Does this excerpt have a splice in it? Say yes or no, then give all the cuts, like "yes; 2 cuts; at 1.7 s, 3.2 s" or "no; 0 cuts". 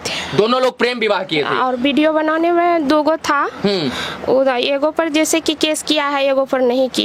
no; 0 cuts